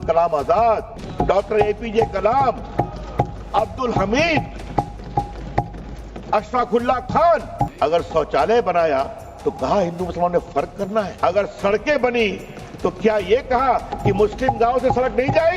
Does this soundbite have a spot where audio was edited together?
yes; 3 cuts; at 1.0 s, 7.7 s, 11.1 s

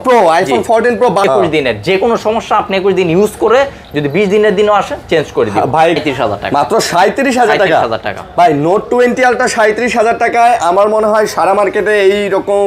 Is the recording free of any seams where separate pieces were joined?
no; 2 cuts; at 1.2 s, 6.0 s

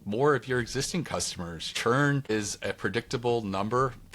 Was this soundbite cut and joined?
yes; 2 cuts; at 1.7 s, 2.3 s

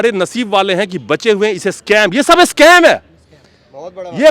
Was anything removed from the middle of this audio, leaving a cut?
no; 0 cuts

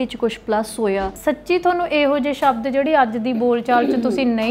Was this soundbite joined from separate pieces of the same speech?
yes; 1 cut; at 1.1 s

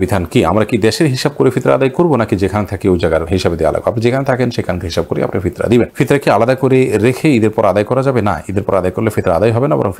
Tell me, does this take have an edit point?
no; 0 cuts

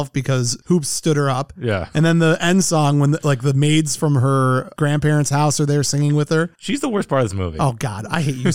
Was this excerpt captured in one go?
yes; 0 cuts

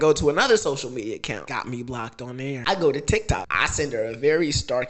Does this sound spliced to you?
yes; 3 cuts; at 1.4 s, 2.6 s, 3.5 s

